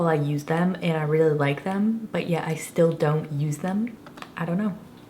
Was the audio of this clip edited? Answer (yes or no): yes